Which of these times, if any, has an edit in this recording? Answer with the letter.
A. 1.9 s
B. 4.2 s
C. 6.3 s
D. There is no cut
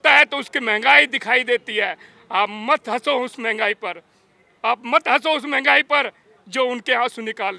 D